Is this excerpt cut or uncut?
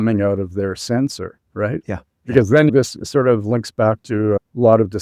uncut